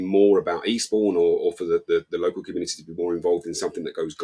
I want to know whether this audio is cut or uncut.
uncut